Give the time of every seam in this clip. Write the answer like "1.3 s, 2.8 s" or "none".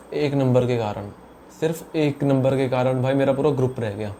none